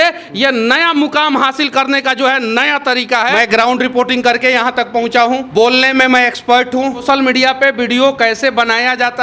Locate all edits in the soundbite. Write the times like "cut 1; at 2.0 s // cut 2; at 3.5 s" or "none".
cut 1; at 3.4 s // cut 2; at 5.5 s // cut 3; at 7.0 s